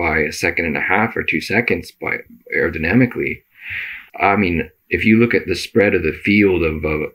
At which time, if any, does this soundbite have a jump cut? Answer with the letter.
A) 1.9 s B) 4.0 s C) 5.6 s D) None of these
B